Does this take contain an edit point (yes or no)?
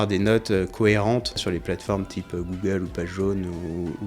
yes